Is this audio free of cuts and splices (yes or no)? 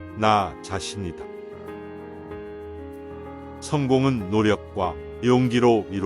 no